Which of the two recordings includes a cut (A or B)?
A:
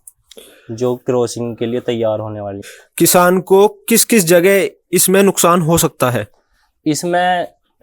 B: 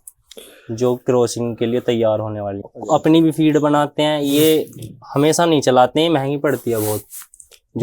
B